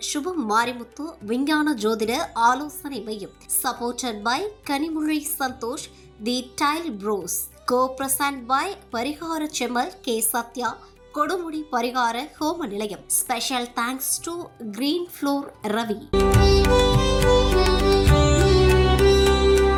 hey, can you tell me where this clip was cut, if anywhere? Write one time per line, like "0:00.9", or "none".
none